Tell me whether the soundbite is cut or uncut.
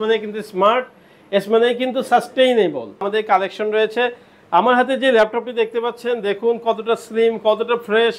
cut